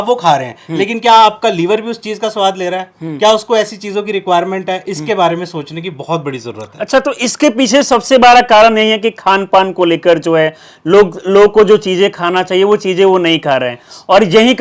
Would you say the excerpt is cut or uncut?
uncut